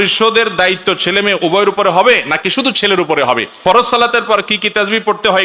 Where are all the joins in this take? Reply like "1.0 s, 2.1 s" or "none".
3.5 s